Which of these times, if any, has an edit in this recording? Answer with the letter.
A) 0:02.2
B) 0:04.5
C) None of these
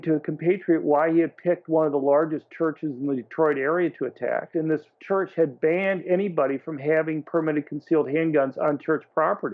B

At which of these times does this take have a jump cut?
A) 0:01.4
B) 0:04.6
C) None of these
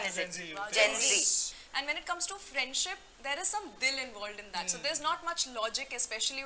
A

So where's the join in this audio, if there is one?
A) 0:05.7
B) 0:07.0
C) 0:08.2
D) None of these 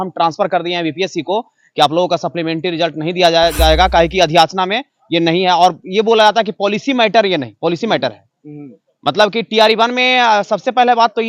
D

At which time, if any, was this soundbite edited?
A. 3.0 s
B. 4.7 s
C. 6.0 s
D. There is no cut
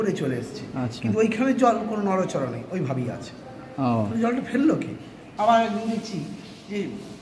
B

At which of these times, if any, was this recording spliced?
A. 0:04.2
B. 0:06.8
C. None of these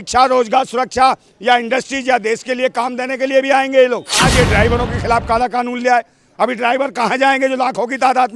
A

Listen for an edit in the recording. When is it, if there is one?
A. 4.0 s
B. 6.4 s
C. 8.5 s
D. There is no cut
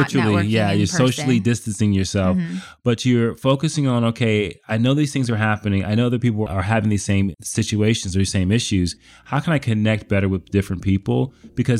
B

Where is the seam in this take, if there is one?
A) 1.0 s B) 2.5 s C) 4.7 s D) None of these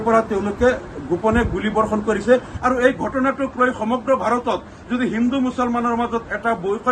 B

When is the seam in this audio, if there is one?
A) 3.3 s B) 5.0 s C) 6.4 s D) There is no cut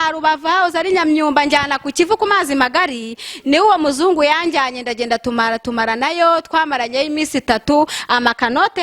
D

